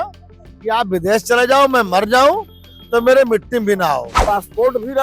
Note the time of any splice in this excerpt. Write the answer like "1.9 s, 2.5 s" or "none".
4.1 s